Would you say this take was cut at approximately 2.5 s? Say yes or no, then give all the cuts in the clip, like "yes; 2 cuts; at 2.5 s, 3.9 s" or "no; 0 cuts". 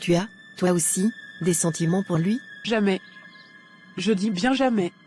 yes; 1 cut; at 2.5 s